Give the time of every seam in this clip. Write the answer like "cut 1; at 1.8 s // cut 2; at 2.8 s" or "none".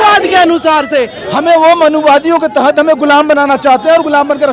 cut 1; at 1.2 s